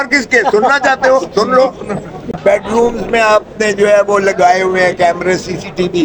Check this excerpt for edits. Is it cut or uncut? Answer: cut